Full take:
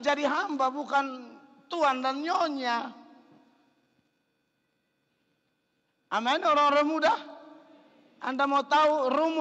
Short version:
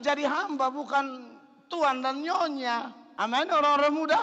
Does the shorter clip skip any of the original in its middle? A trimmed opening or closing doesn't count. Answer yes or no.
yes